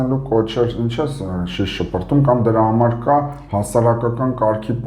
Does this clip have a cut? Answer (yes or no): no